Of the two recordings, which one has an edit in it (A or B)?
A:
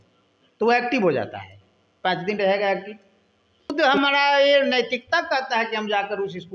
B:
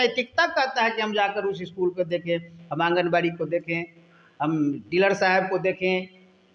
A